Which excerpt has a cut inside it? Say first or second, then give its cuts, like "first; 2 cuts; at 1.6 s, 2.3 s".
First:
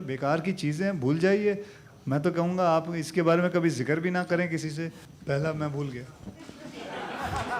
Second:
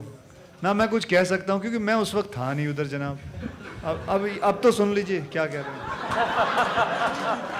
first; 1 cut; at 5.0 s